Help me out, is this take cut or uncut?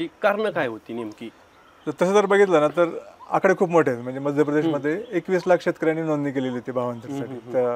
uncut